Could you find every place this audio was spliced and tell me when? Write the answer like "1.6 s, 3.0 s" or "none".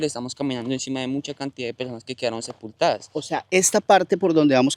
none